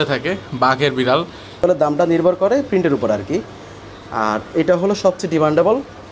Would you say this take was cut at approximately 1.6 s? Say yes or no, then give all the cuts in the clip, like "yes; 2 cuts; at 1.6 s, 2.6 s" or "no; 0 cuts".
yes; 1 cut; at 1.6 s